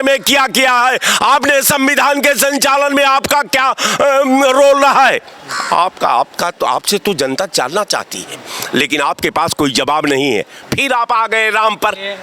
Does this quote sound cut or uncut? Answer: uncut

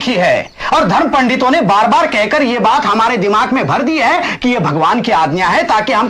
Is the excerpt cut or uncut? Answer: uncut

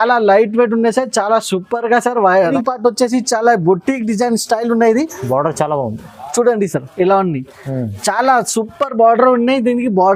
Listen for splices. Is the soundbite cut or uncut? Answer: cut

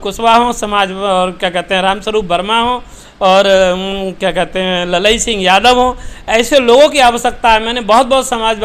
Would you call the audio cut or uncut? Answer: uncut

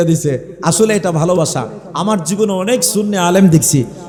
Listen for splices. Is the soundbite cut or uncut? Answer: uncut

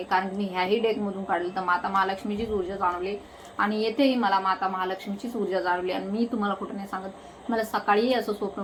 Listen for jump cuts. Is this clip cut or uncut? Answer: uncut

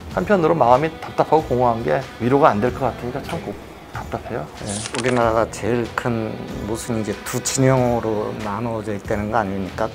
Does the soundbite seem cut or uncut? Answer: cut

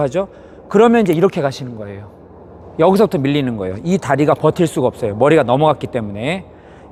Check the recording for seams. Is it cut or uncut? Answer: uncut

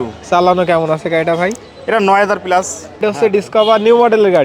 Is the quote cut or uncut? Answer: cut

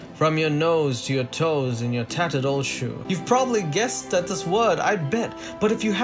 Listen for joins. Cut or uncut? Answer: cut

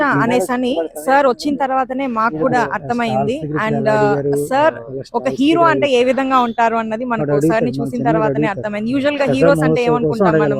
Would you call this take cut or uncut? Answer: uncut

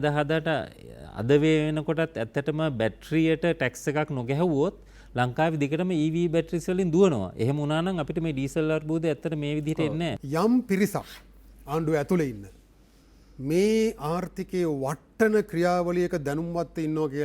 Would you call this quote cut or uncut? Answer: cut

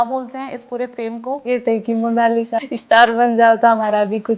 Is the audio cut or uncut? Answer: cut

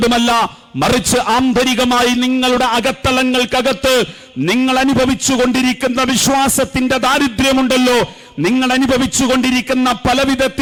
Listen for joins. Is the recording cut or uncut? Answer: uncut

